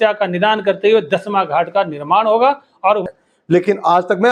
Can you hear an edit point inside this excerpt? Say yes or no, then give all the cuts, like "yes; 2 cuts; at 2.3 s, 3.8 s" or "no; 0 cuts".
yes; 1 cut; at 3.0 s